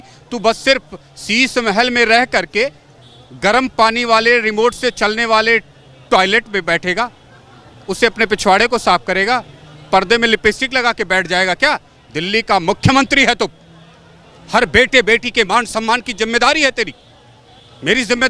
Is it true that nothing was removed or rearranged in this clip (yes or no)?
yes